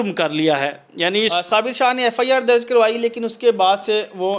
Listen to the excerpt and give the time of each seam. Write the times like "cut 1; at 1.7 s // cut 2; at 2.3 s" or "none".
cut 1; at 1.3 s